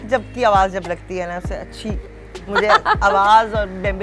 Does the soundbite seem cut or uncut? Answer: uncut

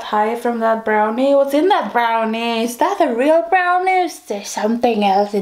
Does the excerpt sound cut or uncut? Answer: uncut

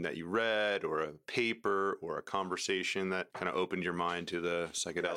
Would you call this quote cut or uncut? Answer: uncut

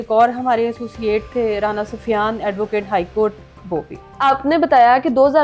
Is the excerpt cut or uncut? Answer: uncut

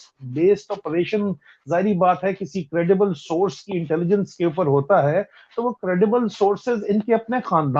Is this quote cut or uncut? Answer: uncut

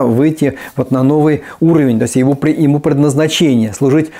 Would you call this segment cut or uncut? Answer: uncut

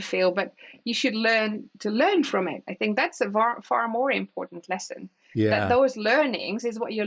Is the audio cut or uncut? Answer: uncut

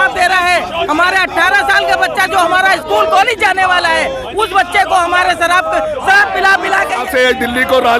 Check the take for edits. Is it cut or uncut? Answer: cut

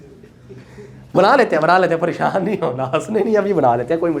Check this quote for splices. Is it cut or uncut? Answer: uncut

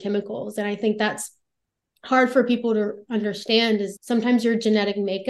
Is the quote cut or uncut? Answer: uncut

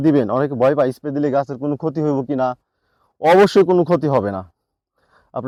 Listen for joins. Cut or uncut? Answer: uncut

